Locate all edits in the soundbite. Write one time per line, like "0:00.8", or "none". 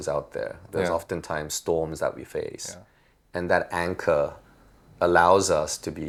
none